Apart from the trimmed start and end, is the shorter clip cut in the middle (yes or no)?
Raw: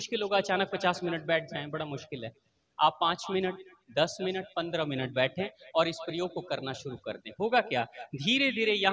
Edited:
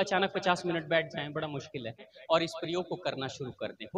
yes